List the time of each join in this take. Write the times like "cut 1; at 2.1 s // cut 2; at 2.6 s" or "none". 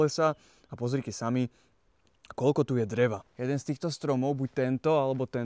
cut 1; at 3.3 s